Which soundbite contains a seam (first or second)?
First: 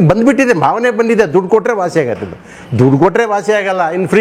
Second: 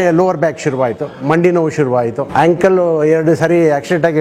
second